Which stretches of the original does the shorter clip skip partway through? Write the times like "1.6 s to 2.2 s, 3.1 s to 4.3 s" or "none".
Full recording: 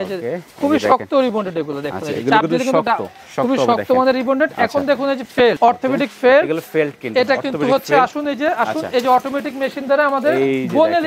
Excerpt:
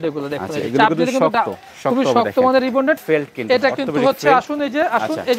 4.5 s to 6.7 s

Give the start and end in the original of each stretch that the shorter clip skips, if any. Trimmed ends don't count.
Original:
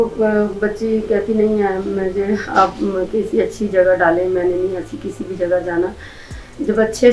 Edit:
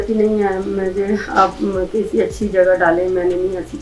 none

